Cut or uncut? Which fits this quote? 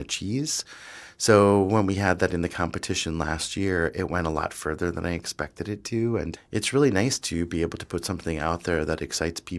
cut